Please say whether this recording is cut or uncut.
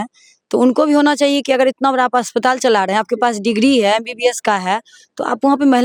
uncut